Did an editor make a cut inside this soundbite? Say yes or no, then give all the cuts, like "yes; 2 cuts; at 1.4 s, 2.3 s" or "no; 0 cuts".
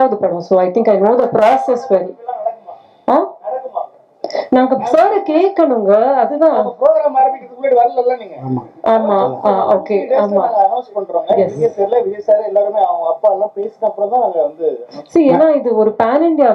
no; 0 cuts